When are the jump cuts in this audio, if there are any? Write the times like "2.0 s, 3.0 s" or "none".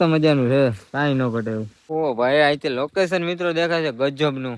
1.8 s